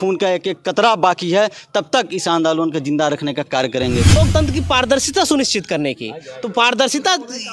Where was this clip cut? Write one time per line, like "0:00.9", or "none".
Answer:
0:04.2